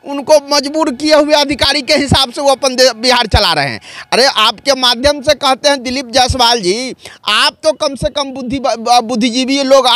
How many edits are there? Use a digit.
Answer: 0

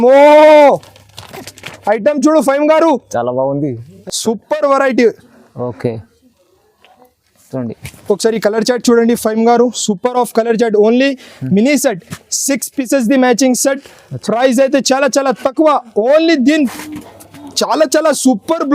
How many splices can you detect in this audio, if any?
2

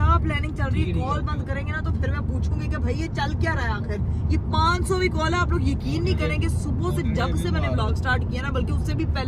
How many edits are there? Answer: 0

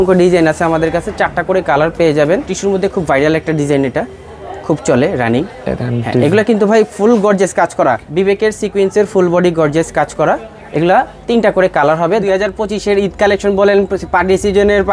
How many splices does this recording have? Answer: 3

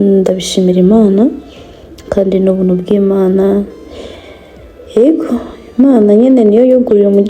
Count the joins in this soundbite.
0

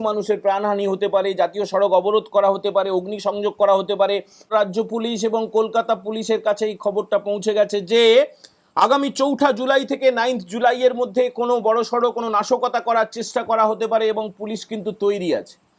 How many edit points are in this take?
1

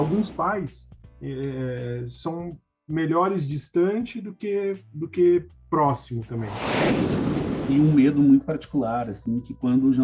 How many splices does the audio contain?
1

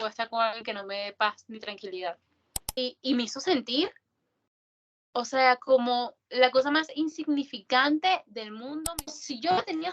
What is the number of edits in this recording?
2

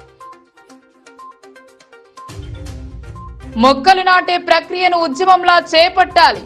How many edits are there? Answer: 1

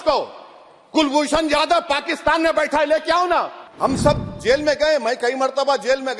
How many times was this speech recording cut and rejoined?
1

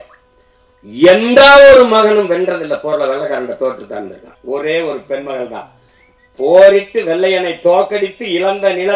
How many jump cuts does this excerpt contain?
1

